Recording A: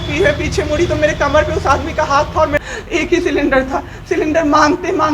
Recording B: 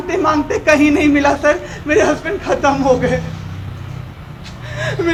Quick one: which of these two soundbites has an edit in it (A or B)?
A